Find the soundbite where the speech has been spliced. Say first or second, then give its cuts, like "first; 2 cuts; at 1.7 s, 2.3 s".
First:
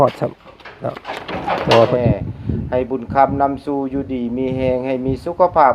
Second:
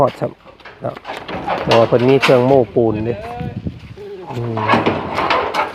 first; 1 cut; at 1.9 s